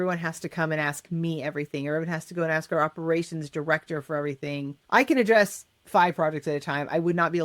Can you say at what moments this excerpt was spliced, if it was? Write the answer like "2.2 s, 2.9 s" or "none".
4.8 s